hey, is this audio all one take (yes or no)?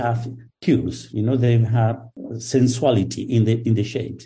yes